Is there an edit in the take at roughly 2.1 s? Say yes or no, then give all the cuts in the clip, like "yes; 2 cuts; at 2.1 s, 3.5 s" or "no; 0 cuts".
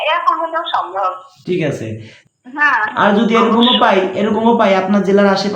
yes; 1 cut; at 2.1 s